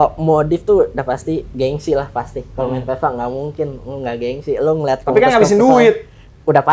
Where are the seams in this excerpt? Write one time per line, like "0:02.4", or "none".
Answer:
none